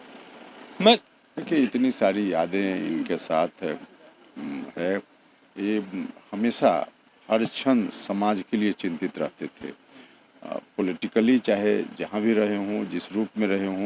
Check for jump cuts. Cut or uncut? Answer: cut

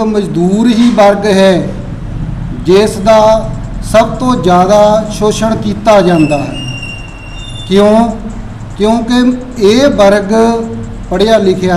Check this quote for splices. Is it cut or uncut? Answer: uncut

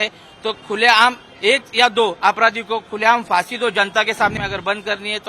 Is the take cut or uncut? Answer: cut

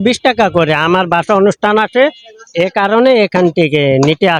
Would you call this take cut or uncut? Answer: uncut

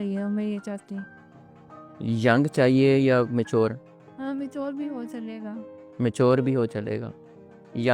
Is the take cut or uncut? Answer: uncut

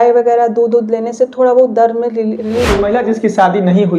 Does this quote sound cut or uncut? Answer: cut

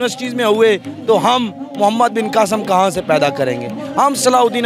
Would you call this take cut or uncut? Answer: uncut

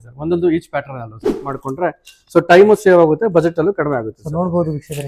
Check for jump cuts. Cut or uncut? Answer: cut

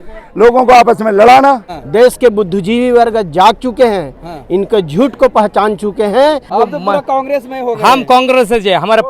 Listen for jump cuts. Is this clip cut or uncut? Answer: cut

